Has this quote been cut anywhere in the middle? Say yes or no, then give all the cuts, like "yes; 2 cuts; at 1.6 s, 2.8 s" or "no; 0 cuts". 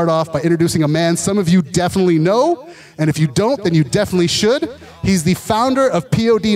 no; 0 cuts